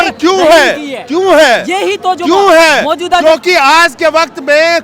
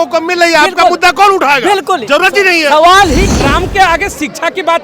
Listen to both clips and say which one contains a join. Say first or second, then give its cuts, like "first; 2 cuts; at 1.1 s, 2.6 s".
second; 1 cut; at 3.2 s